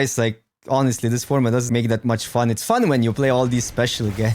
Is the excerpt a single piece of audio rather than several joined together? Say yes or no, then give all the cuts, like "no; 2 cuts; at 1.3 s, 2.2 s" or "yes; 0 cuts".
no; 1 cut; at 1.7 s